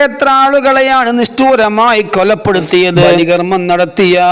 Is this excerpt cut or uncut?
cut